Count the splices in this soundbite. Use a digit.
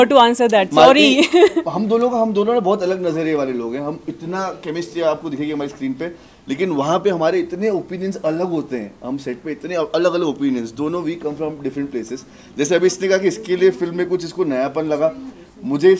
0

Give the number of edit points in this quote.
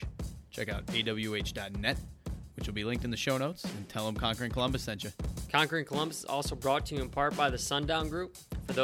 1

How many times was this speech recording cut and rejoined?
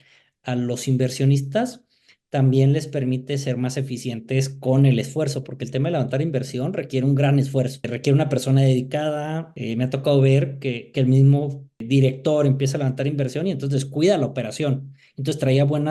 2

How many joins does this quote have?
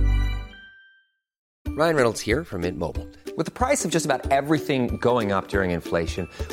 1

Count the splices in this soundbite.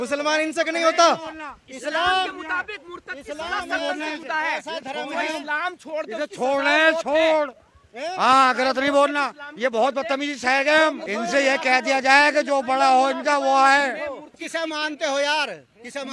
2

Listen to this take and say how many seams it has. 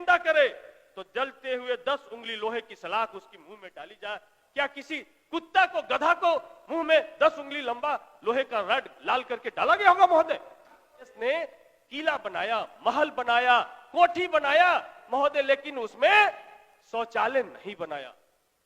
1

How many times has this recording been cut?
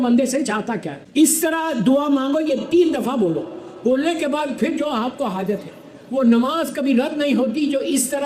1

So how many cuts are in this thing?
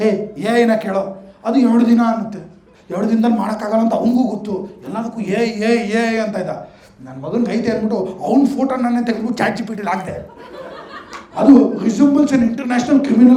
0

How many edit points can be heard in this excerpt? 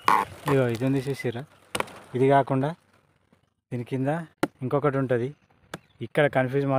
1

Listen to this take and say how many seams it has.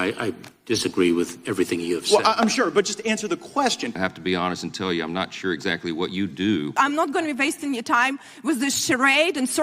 2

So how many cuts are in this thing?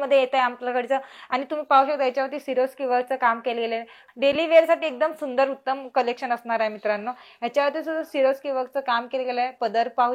1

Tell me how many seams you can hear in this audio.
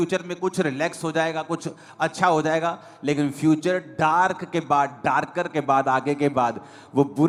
0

